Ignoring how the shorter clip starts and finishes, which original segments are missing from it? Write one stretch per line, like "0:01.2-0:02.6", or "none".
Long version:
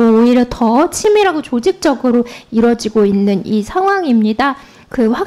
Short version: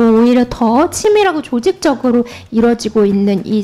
none